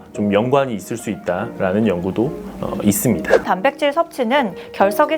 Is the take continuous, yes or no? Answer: no